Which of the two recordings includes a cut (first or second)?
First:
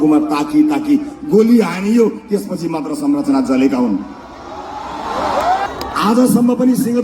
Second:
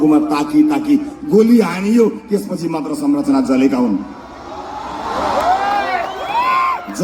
first